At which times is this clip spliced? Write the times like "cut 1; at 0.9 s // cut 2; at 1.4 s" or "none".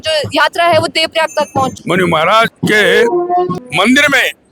cut 1; at 1.8 s // cut 2; at 2.5 s // cut 3; at 3.5 s